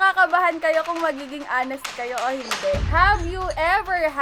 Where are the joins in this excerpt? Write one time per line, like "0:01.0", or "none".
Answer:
none